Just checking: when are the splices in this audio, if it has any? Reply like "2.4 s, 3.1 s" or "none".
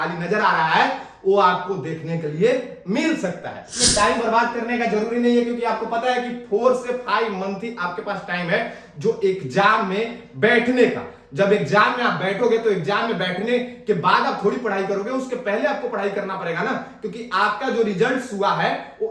3.8 s